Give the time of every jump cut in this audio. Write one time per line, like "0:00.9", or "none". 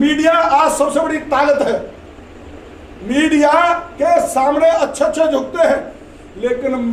none